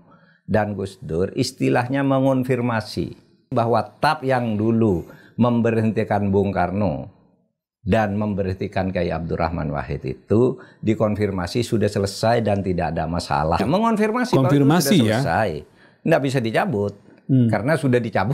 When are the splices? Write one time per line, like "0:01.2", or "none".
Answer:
0:03.5
0:13.6